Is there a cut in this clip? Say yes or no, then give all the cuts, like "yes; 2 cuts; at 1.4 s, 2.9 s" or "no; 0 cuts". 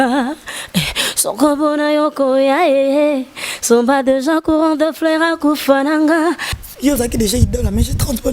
yes; 1 cut; at 6.5 s